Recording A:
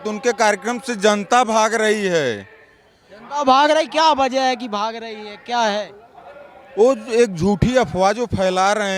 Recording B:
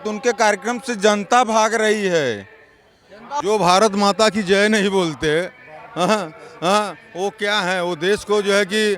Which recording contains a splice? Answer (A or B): B